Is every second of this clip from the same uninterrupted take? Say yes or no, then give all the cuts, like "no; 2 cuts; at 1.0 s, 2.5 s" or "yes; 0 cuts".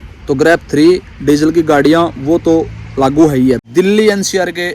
no; 1 cut; at 3.6 s